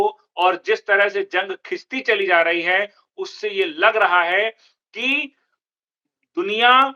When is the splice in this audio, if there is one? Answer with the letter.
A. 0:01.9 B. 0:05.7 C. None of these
C